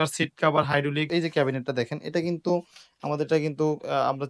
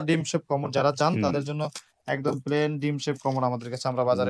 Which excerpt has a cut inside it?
first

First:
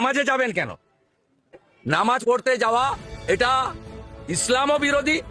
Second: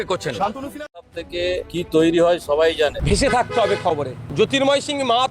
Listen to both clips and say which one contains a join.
second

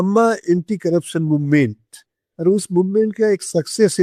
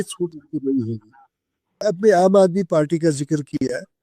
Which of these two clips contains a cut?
second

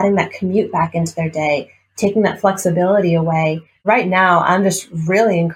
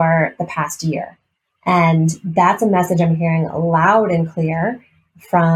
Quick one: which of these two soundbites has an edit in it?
first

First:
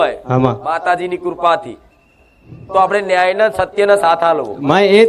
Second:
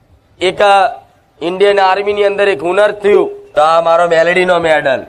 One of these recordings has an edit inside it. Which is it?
second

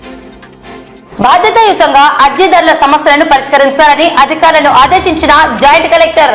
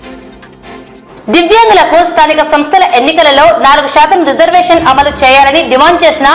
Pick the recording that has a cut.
second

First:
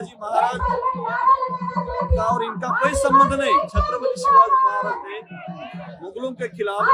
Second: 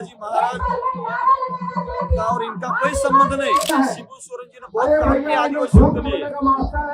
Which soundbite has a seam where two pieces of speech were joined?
second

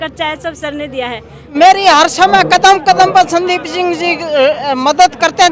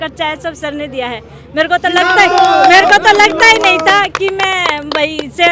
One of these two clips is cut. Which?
first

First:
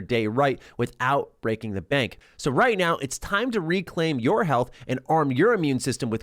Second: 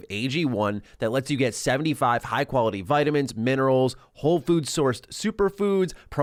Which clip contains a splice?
first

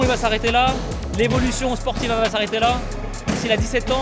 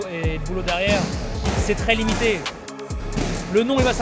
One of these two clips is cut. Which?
second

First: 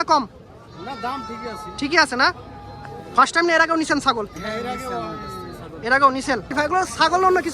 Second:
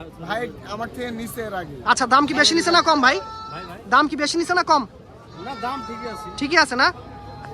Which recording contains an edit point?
first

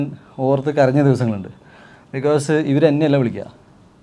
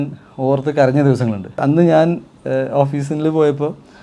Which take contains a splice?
second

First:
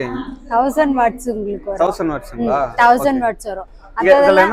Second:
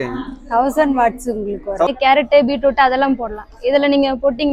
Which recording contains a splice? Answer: second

